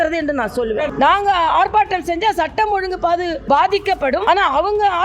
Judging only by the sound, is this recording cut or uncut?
cut